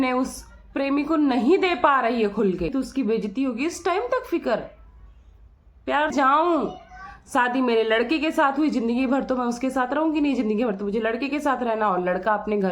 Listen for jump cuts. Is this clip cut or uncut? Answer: cut